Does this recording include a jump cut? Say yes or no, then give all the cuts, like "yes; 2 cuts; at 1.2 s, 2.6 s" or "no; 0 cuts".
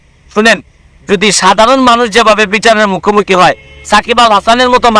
no; 0 cuts